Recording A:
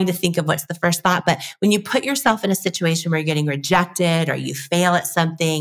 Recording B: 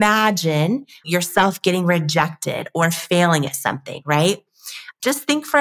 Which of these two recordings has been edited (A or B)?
B